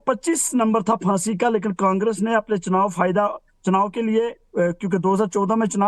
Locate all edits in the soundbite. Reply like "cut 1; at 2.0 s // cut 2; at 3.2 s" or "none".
cut 1; at 3.2 s